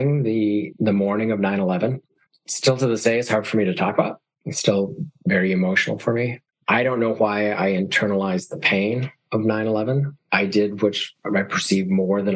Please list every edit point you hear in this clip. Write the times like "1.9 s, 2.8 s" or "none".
2.2 s, 6.4 s, 10.1 s